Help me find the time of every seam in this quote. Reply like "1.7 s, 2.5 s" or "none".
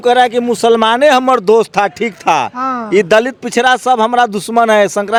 none